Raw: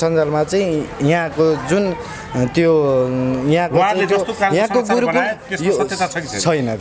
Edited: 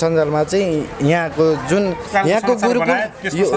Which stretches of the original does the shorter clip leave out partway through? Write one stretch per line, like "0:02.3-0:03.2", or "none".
0:02.0-0:04.3